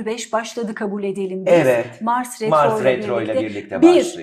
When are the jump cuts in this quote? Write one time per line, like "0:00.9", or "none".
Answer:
none